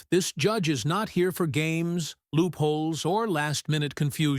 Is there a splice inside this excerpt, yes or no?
no